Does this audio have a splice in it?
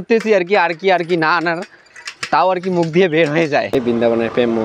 yes; 1 cut; at 3.8 s

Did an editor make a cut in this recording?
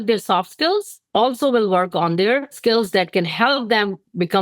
yes; 1 cut; at 2.6 s

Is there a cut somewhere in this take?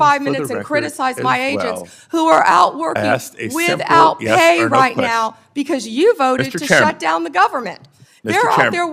no; 0 cuts

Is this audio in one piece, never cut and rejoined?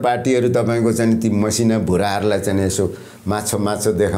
yes; 0 cuts

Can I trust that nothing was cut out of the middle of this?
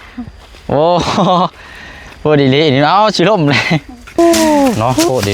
no; 1 cut; at 4.2 s

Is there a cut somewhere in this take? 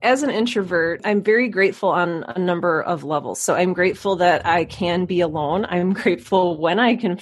yes; 1 cut; at 1.0 s

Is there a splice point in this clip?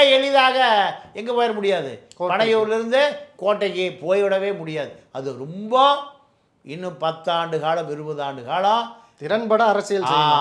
no; 0 cuts

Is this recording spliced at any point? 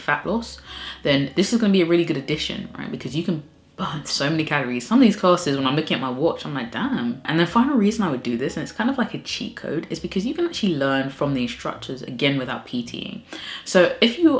no; 0 cuts

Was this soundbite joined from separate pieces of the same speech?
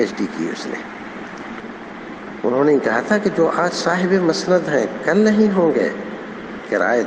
yes; 1 cut; at 1.6 s

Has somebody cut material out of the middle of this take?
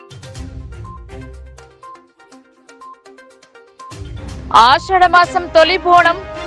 no; 0 cuts

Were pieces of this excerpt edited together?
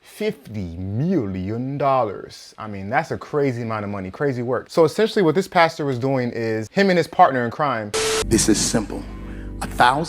yes; 1 cut; at 7.9 s

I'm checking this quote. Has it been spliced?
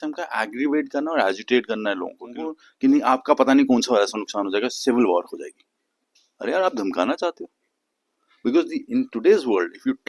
yes; 1 cut; at 2.4 s

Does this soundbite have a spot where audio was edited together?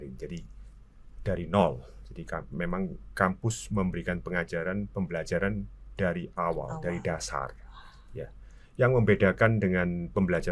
no; 0 cuts

